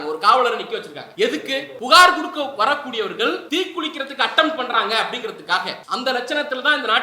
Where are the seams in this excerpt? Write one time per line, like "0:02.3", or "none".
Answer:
0:01.0
0:01.7
0:03.4
0:05.8